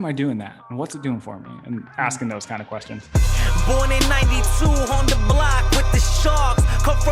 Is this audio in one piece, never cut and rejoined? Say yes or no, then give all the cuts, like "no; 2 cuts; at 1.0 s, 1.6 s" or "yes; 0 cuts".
no; 1 cut; at 2.9 s